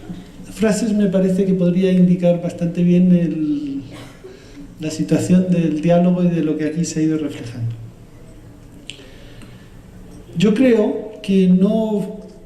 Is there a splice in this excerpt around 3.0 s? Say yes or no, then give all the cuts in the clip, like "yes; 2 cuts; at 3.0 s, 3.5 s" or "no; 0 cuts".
no; 1 cut; at 6.3 s